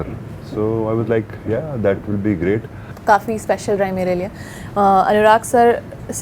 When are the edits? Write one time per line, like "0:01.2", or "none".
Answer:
0:02.9